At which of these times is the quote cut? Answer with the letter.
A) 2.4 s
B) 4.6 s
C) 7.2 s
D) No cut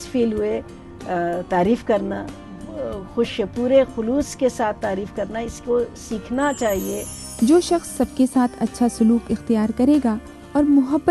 C